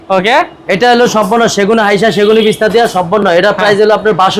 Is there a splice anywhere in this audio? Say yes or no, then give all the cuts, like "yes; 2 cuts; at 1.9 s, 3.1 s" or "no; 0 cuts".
no; 0 cuts